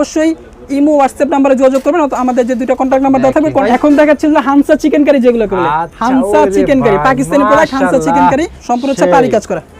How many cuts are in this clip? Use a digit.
2